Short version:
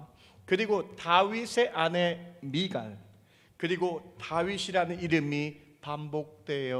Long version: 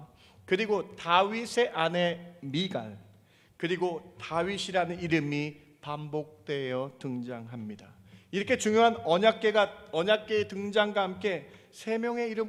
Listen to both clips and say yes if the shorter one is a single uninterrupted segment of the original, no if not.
yes